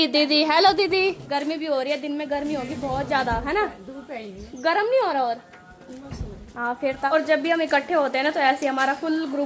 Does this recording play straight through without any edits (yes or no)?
no